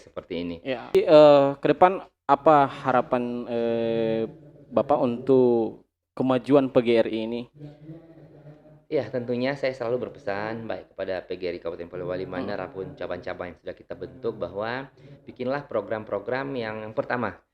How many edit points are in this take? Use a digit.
1